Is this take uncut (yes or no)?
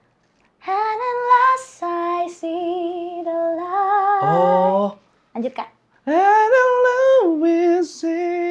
yes